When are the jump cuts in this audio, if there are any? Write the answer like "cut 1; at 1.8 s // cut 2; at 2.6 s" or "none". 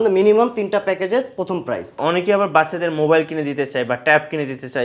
cut 1; at 2.0 s